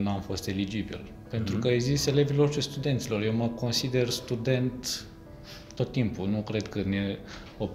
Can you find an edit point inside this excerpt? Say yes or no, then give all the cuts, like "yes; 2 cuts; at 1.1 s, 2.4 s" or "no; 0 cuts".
no; 0 cuts